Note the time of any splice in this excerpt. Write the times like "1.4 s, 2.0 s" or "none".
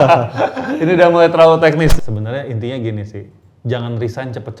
2.0 s